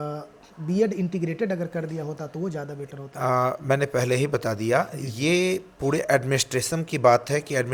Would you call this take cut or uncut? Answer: uncut